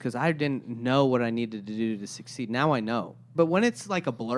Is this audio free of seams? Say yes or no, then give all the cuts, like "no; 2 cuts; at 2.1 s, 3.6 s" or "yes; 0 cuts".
no; 1 cut; at 3.3 s